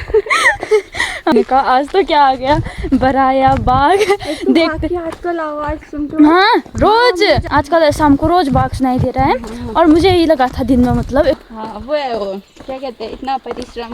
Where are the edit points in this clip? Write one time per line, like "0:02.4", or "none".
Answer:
0:01.3
0:07.5
0:11.4